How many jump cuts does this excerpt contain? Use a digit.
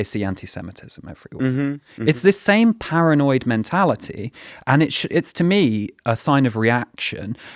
0